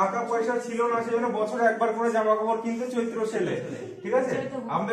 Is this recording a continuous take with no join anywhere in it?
yes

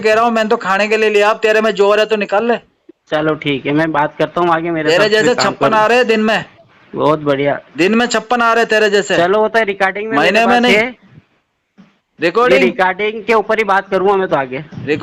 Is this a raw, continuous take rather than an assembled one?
yes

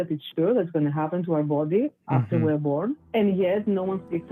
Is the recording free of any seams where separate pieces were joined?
no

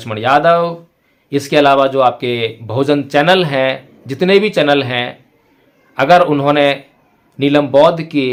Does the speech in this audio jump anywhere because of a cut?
no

